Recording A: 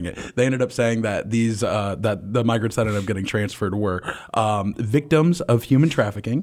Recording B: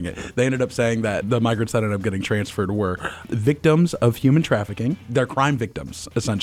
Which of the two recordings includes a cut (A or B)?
B